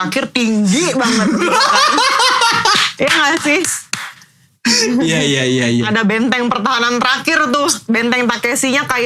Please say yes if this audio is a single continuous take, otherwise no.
yes